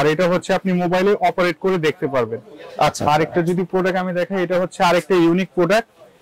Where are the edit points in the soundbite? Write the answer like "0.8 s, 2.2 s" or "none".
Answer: 2.9 s